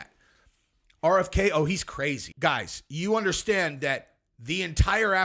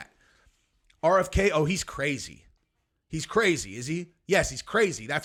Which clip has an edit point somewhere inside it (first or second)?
first